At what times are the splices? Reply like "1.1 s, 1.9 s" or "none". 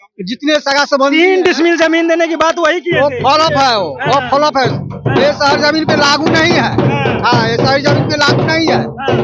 none

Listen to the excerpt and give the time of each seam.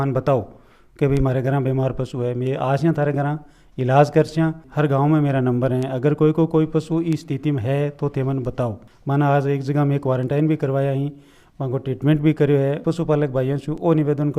4.6 s, 8.9 s, 12.8 s

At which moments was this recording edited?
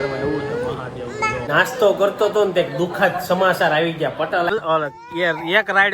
1.6 s, 4.5 s

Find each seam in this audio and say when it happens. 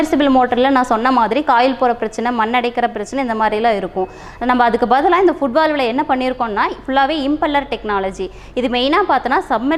none

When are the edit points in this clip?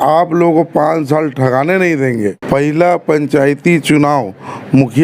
2.4 s

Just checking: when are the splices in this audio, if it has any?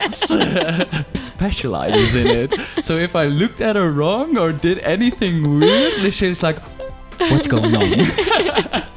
1.2 s

